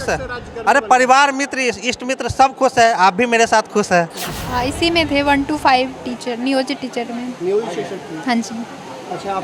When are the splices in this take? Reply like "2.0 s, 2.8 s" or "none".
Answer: 4.4 s